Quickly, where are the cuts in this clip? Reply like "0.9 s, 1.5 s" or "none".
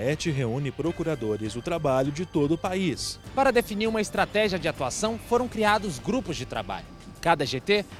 3.1 s

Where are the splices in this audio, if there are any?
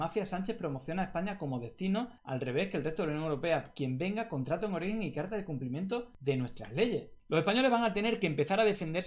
2.2 s, 6.1 s, 7.2 s

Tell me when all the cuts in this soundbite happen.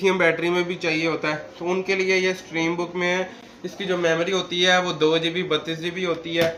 none

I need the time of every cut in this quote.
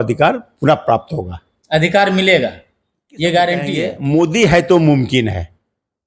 3.9 s

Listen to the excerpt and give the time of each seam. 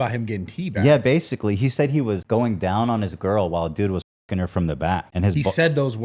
2.2 s, 5.1 s

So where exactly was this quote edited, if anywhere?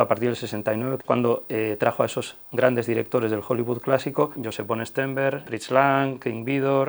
4.4 s, 5.4 s

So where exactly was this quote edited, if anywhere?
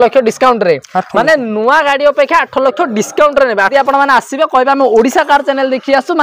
3.7 s

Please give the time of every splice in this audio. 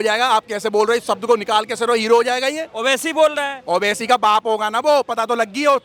none

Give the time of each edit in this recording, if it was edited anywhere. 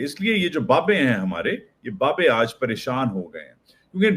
none

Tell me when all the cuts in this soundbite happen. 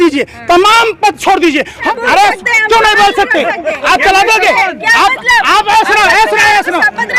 1.8 s

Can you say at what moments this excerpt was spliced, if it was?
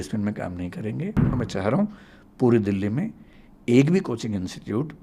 1.3 s

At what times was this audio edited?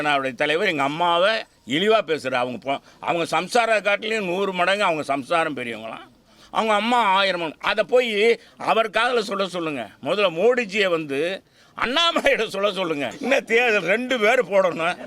13.1 s

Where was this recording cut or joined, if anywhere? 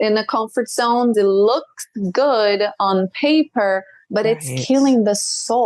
1.1 s

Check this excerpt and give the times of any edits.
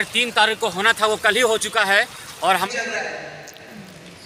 2.7 s

